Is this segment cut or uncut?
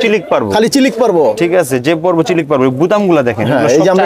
uncut